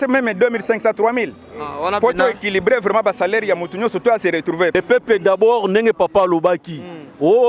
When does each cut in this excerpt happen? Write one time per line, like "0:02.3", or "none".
0:04.7